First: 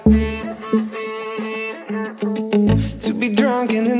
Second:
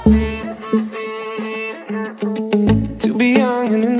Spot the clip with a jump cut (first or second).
first